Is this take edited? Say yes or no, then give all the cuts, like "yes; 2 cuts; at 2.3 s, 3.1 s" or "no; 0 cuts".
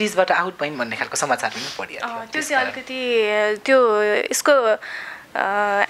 no; 0 cuts